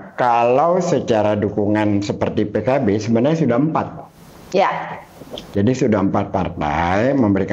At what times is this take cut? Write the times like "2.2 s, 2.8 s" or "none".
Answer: none

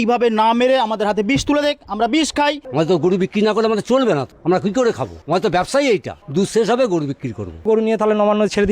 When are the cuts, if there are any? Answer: 2.6 s, 4.3 s, 5.1 s, 6.2 s, 7.7 s

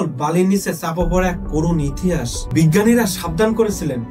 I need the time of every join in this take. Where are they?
2.4 s

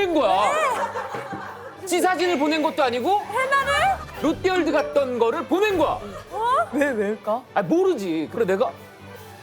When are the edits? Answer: 1.8 s, 8.3 s

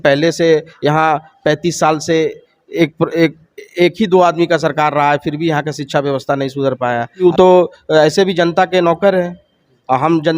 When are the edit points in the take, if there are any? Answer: 7.2 s

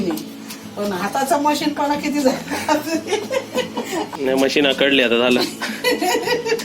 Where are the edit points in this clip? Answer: 4.1 s

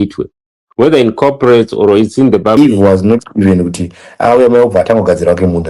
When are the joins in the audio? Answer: 2.6 s

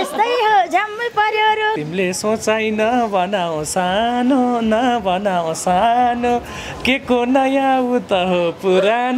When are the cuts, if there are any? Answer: 1.8 s

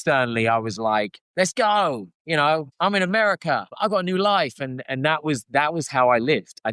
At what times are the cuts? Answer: 1.2 s, 2.7 s, 3.7 s

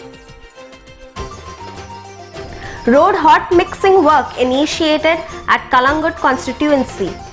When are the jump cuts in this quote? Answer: none

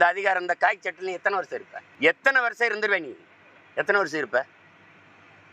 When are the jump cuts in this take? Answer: 1.8 s

